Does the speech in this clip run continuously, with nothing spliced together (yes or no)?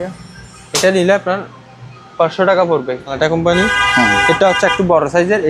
no